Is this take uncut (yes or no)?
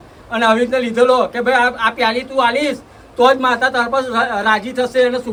yes